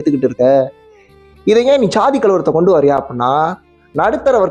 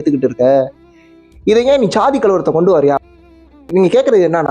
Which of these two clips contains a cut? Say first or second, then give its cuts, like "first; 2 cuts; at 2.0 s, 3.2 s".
second; 1 cut; at 3.3 s